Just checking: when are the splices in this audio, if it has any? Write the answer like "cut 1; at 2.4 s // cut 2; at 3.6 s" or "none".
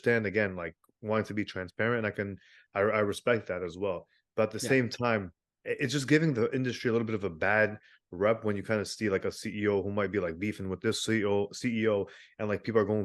none